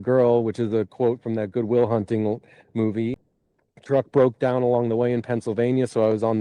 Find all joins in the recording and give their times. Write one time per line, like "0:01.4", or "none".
0:03.2